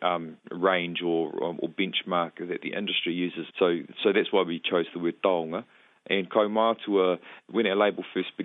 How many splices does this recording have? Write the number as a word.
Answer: two